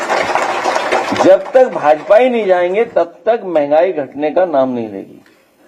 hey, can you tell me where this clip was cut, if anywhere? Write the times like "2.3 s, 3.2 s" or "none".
none